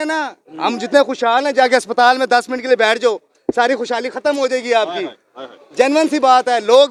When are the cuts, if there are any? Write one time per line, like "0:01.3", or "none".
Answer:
none